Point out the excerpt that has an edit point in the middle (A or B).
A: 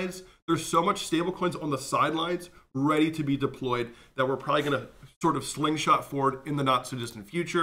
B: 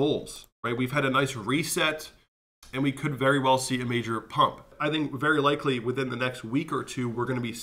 B